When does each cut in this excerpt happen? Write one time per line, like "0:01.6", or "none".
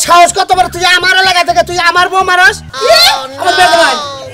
0:02.7

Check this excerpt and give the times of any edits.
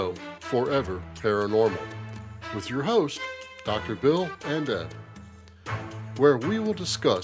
none

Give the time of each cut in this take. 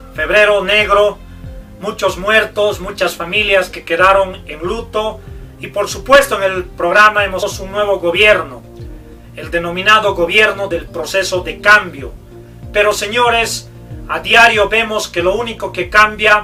none

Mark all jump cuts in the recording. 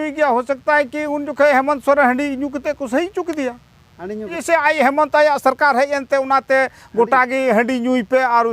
0:04.4

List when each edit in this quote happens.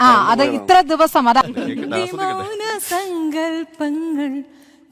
none

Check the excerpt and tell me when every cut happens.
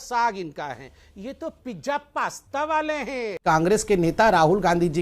0:03.4

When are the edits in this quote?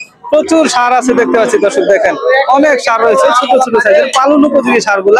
none

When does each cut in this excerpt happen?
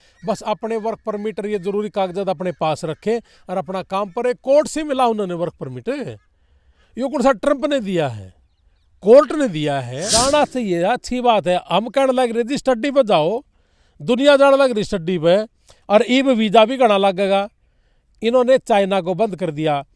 0:10.0

